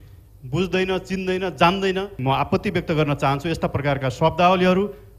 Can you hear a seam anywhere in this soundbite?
yes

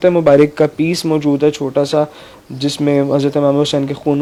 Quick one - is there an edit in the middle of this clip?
no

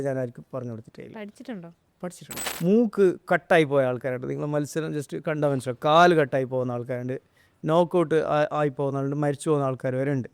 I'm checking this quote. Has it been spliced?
yes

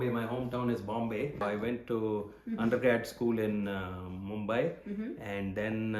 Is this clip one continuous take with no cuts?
no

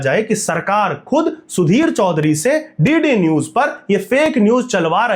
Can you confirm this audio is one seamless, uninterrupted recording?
yes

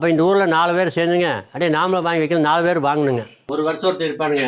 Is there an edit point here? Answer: yes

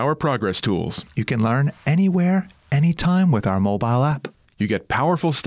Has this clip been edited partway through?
no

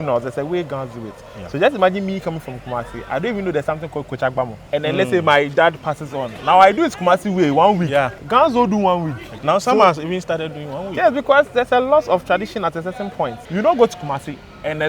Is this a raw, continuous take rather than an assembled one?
no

